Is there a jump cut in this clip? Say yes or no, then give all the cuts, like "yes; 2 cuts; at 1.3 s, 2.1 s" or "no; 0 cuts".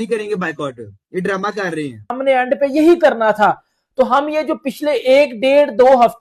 yes; 1 cut; at 2.1 s